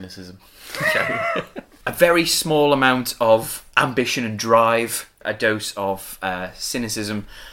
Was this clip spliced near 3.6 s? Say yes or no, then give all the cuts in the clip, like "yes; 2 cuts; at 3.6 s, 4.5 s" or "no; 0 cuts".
yes; 3 cuts; at 1.6 s, 3.6 s, 5.2 s